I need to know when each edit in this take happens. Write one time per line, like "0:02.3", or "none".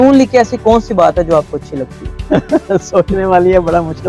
0:02.1